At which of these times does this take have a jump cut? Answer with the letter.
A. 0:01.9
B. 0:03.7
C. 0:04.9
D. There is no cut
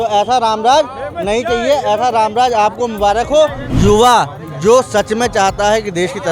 B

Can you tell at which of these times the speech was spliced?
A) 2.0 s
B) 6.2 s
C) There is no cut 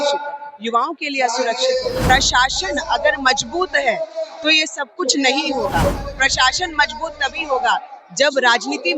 A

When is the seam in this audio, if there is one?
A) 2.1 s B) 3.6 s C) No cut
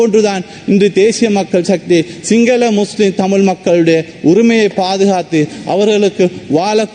C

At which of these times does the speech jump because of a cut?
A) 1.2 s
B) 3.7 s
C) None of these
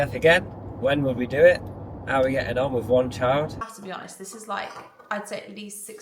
B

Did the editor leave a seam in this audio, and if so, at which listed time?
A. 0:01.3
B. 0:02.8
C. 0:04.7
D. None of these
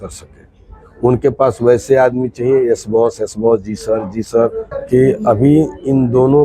C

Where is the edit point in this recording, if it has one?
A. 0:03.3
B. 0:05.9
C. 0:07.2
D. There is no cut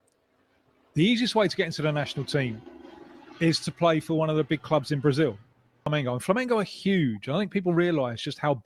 B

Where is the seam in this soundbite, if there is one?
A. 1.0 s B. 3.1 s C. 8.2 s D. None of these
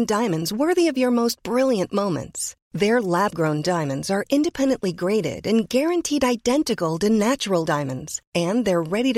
D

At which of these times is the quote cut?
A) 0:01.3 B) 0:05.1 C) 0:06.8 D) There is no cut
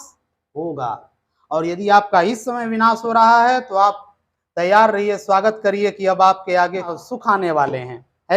C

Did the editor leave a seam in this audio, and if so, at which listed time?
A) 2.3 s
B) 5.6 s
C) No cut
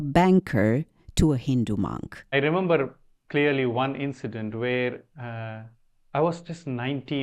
A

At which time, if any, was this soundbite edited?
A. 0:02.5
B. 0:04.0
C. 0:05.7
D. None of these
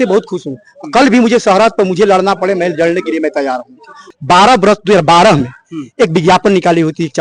B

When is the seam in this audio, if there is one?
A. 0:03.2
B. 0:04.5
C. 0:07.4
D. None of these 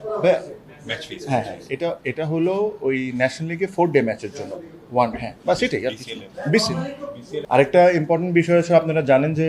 C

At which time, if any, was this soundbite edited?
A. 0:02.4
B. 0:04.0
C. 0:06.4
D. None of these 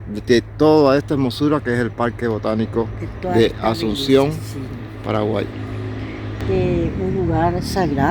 C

